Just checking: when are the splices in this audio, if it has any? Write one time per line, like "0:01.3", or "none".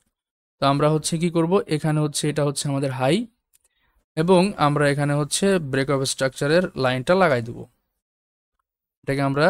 none